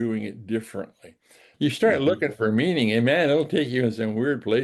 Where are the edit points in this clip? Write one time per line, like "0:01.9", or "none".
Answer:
0:01.4

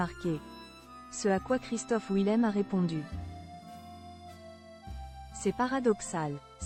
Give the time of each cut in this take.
none

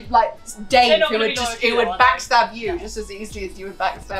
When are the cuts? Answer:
none

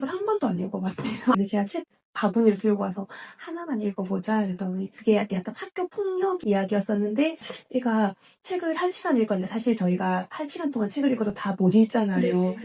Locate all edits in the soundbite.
0:01.3
0:04.9
0:07.5

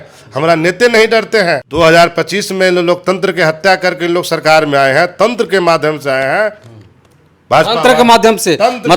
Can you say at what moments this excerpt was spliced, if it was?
0:01.7

